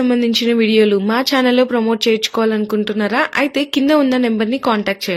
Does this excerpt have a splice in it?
no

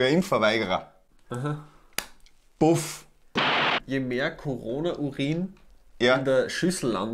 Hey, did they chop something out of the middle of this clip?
yes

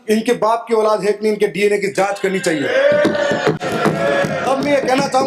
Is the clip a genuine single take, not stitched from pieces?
yes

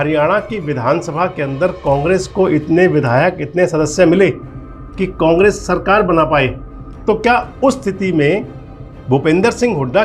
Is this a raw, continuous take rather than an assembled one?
yes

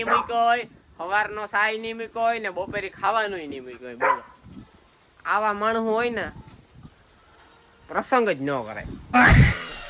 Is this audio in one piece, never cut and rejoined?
no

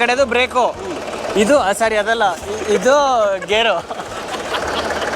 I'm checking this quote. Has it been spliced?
yes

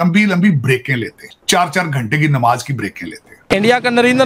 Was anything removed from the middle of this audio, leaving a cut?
yes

